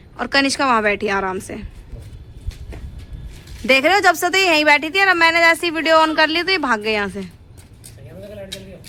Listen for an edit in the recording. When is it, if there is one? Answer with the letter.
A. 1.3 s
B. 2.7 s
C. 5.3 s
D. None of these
D